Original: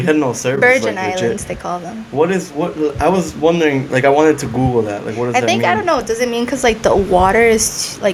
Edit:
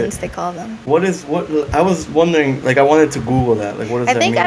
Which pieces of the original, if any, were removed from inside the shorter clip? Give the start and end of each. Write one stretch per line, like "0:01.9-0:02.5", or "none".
none